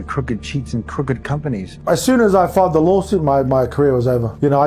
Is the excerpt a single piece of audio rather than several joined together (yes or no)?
no